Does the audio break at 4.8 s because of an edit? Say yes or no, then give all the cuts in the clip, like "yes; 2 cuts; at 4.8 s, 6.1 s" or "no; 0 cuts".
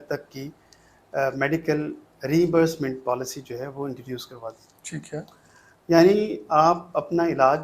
no; 0 cuts